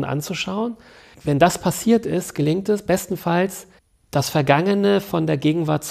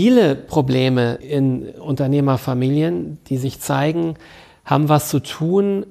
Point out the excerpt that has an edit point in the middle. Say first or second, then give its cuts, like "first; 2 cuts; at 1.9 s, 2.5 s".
second; 1 cut; at 1.2 s